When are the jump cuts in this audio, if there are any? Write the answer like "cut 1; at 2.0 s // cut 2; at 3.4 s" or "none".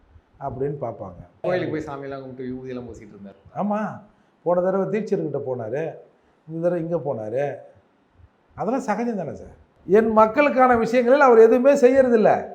cut 1; at 1.4 s // cut 2; at 9.7 s